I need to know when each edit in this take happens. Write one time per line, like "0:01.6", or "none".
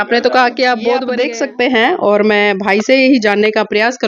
0:01.2